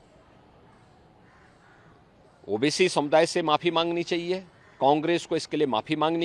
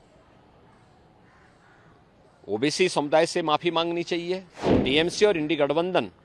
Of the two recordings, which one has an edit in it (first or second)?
second